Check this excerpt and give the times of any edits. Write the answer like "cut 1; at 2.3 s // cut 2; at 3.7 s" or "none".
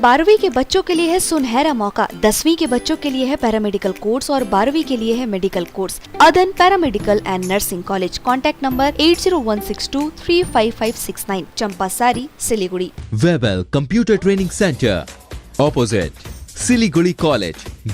cut 1; at 6.0 s // cut 2; at 13.0 s